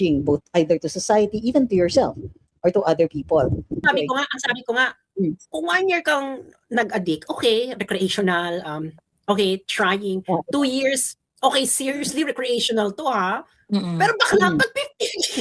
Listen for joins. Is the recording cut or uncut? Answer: cut